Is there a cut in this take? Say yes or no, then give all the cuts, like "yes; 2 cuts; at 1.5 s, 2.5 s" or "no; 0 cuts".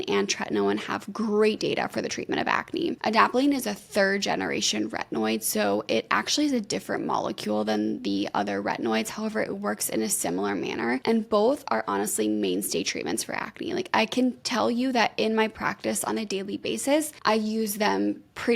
yes; 4 cuts; at 3.0 s, 11.0 s, 14.4 s, 17.1 s